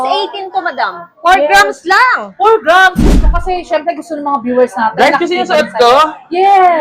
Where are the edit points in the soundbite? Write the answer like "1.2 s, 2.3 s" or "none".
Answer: 3.1 s